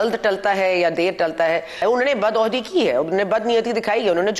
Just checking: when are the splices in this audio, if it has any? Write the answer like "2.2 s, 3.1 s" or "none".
1.8 s